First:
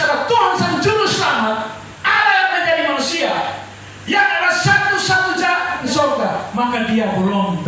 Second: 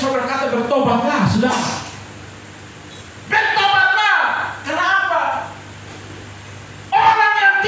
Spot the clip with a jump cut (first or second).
first